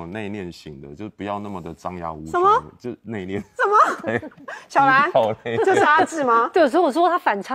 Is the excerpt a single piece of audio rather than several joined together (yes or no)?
yes